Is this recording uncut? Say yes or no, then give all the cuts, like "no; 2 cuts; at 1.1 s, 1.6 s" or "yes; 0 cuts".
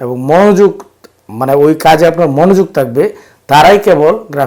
yes; 0 cuts